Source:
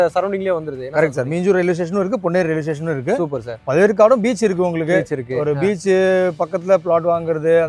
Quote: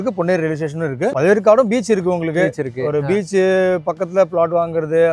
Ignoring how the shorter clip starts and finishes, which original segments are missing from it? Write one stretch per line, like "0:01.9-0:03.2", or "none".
0:03.2-0:03.6